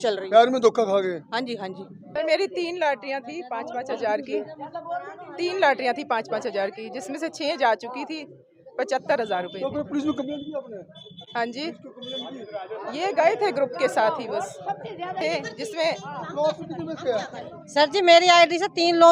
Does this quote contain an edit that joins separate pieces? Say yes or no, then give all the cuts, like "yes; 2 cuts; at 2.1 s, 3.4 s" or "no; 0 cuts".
yes; 2 cuts; at 2.0 s, 15.2 s